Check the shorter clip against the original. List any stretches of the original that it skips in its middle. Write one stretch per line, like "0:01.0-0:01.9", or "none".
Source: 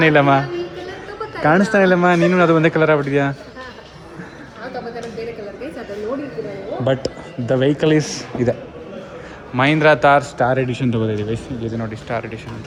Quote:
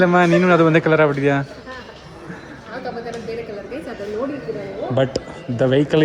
none